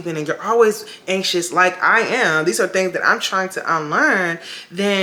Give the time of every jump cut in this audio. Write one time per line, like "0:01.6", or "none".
none